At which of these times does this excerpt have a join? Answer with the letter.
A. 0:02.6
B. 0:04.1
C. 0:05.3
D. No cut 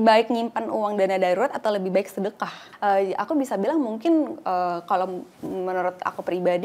A